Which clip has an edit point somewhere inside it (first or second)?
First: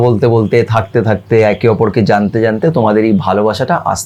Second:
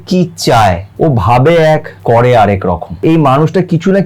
second